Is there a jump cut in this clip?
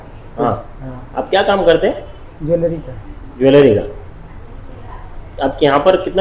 no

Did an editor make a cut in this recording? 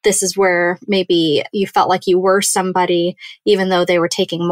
no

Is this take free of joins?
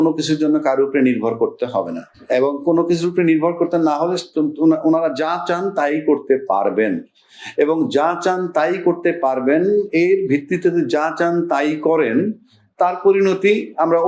yes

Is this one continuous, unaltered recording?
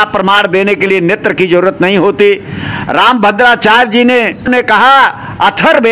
yes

